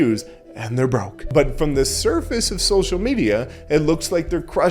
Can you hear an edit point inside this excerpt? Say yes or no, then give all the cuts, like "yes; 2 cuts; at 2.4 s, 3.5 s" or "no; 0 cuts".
yes; 1 cut; at 1.2 s